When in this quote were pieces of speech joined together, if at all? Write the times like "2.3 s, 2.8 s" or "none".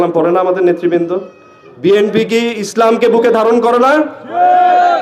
none